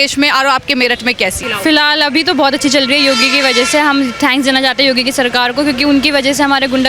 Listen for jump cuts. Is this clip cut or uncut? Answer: cut